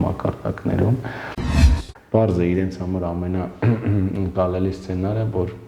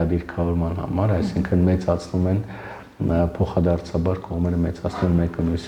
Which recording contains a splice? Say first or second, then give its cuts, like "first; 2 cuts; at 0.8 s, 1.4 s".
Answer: first; 1 cut; at 1.7 s